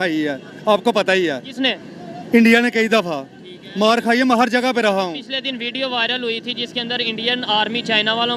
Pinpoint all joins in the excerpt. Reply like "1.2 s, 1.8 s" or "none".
none